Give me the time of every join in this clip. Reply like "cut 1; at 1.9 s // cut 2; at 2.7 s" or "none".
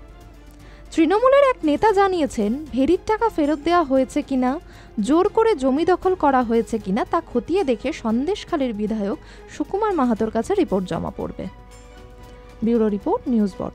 cut 1; at 12.4 s

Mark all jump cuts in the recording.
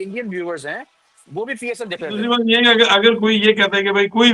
cut 1; at 2.2 s

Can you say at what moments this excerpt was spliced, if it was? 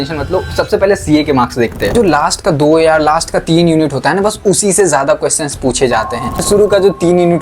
cut 1; at 1.9 s // cut 2; at 6.4 s

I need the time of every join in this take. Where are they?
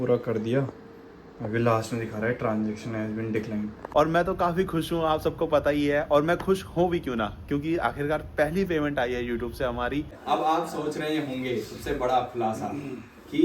cut 1; at 3.8 s // cut 2; at 10.2 s

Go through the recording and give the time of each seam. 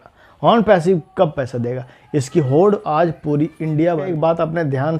cut 1; at 4.1 s

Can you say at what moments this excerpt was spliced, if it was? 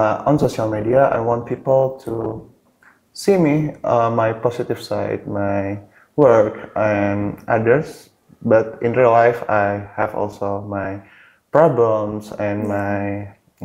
none

